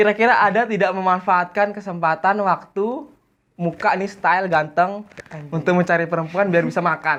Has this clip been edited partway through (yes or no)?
no